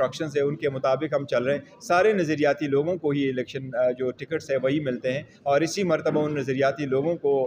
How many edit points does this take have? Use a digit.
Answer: 0